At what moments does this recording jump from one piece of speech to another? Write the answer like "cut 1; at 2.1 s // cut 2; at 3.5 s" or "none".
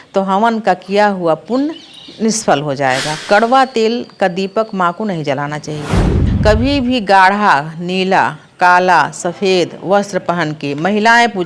cut 1; at 3.2 s // cut 2; at 6.2 s